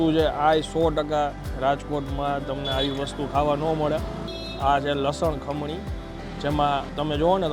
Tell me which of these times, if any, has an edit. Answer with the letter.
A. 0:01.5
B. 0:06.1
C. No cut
A